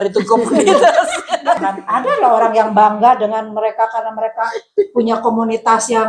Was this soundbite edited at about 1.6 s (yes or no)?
yes